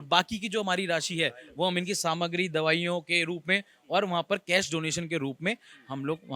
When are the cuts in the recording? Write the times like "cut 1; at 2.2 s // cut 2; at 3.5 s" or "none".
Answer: none